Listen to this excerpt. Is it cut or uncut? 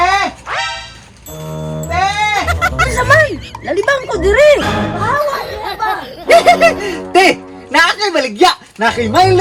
uncut